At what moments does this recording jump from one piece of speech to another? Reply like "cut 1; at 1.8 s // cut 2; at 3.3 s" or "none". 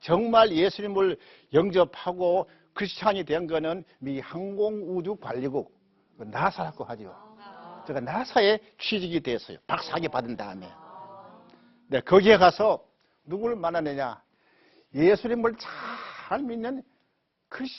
none